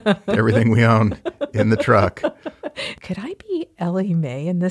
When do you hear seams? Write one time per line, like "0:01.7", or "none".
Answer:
0:02.9